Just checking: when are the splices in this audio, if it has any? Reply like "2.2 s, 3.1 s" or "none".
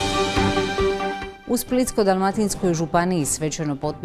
1.0 s